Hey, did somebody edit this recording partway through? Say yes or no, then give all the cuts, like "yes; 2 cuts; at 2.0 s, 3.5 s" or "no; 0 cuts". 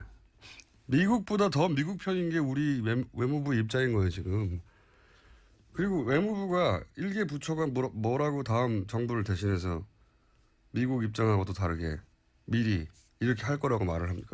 yes; 1 cut; at 4.5 s